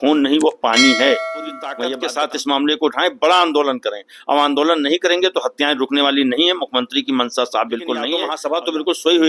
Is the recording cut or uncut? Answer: cut